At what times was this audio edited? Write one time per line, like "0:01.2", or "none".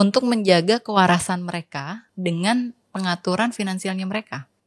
0:02.0